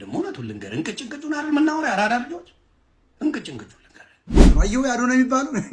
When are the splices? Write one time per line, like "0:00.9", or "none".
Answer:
0:04.4

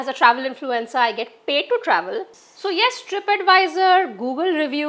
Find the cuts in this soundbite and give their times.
0:02.4

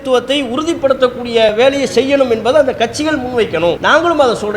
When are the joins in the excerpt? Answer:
0:01.5
0:03.8

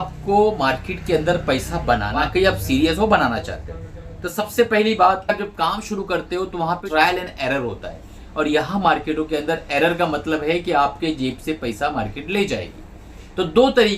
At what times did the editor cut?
0:02.2
0:05.3
0:06.8

